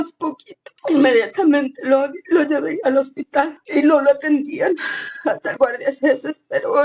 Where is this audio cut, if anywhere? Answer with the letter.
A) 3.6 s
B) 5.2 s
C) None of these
A